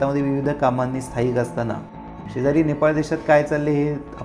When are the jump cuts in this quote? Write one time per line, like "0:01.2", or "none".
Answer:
none